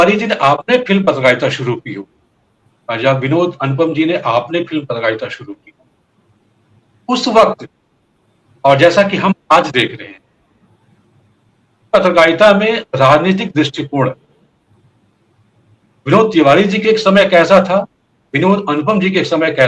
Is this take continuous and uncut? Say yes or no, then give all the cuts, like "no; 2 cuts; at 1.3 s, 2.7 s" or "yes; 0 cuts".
yes; 0 cuts